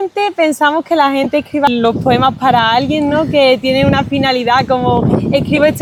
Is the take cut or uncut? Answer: uncut